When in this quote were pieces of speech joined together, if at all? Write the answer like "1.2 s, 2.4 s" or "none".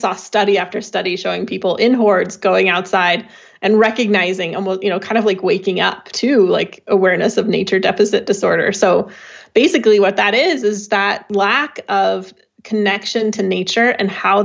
6.0 s, 11.2 s